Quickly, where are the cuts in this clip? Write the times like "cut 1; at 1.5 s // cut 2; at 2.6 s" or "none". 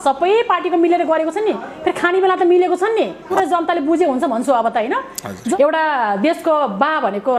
cut 1; at 3.3 s // cut 2; at 5.5 s